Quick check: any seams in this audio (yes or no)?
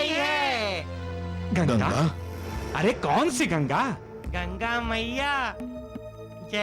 no